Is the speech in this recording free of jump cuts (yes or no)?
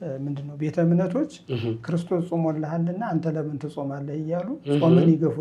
yes